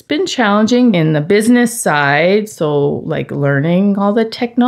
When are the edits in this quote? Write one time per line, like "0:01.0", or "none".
0:00.9